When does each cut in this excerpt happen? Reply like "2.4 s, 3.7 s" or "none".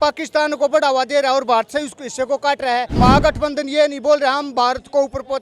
3.0 s